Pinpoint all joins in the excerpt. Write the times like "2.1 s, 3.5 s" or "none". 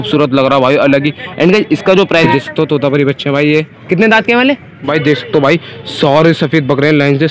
2.3 s, 4.9 s